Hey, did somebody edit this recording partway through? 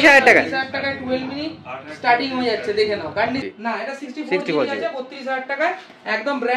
yes; 1 cut; at 3.5 s

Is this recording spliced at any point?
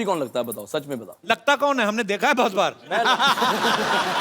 yes; 1 cut; at 1.3 s

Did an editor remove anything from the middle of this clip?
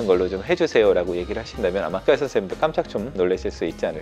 yes; 2 cuts; at 2.0 s, 3.1 s

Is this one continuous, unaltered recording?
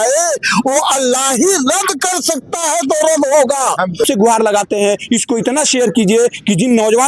no; 1 cut; at 4.1 s

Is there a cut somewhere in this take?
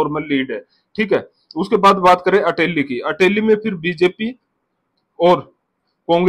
no; 0 cuts

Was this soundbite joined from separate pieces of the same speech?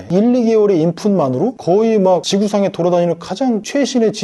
no; 0 cuts

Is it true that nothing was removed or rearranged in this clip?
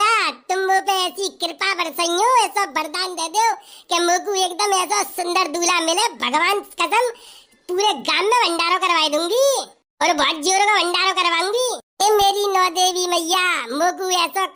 yes; 0 cuts

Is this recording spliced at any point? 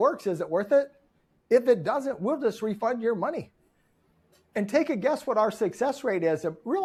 no; 0 cuts

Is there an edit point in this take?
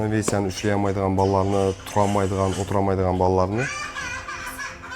no; 0 cuts

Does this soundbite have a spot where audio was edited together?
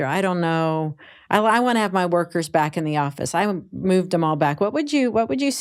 no; 0 cuts

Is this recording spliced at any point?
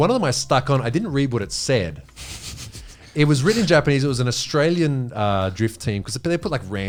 no; 0 cuts

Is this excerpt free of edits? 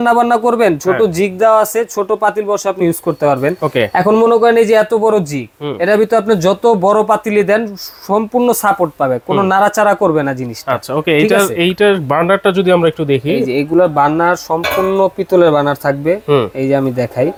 yes; 0 cuts

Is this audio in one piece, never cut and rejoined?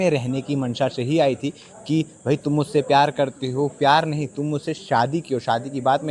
yes; 0 cuts

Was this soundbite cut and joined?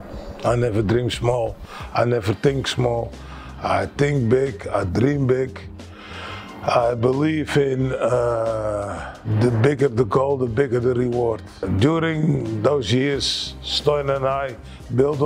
yes; 2 cuts; at 9.2 s, 11.6 s

